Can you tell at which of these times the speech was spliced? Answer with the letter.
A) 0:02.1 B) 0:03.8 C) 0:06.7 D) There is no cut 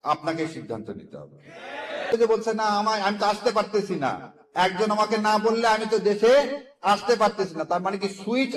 A